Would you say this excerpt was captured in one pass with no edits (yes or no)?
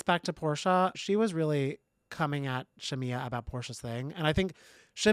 no